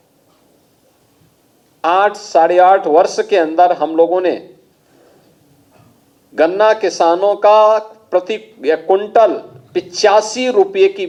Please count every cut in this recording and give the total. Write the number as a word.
zero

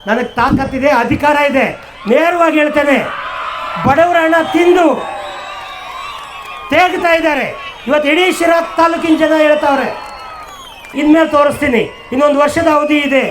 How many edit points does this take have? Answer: one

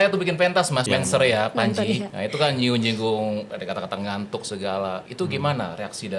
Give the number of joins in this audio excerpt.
four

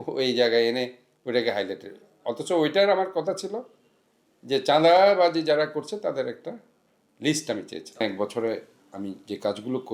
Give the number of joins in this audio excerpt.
one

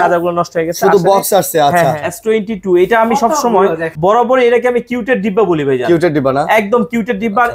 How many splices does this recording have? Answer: two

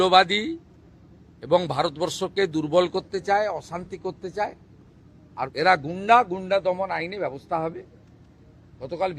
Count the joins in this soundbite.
one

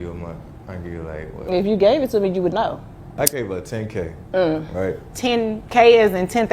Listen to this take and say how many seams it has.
one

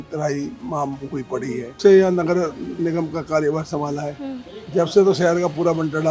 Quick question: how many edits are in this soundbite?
one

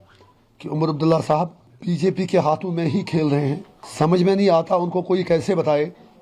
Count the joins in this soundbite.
two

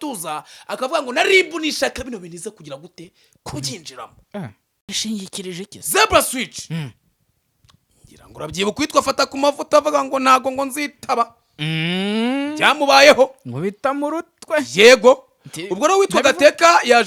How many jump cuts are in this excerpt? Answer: zero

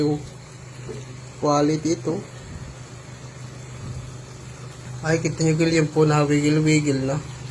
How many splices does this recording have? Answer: one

